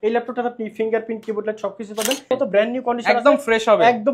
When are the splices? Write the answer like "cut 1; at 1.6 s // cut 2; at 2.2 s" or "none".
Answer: cut 1; at 2.3 s